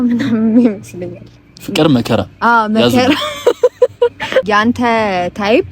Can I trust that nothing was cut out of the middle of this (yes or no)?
no